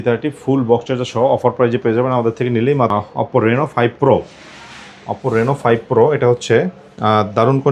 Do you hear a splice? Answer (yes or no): yes